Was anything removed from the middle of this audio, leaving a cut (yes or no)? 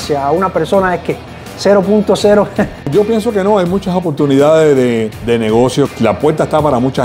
yes